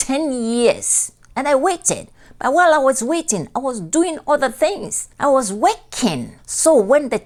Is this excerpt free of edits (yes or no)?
yes